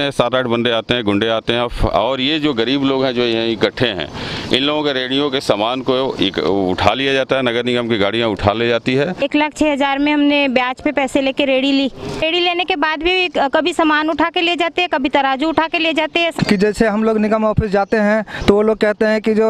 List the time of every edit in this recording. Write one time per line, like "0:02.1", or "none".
0:09.2
0:12.0
0:16.3